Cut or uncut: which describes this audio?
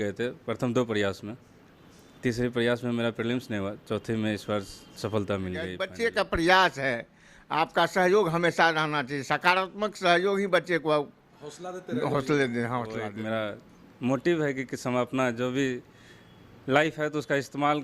cut